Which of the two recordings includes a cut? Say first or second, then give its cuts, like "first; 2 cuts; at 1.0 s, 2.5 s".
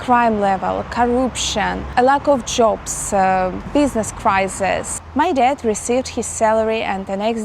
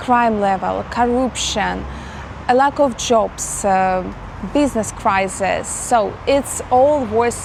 first; 3 cuts; at 1.8 s, 3.6 s, 4.9 s